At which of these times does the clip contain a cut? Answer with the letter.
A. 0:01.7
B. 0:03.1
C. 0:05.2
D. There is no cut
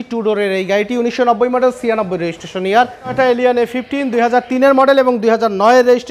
B